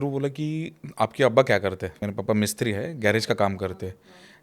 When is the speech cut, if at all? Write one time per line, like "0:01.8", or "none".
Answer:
0:02.0